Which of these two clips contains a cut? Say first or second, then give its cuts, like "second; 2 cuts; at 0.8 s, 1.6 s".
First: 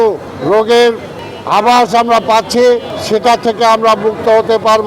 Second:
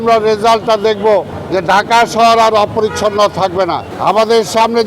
second; 1 cut; at 3.9 s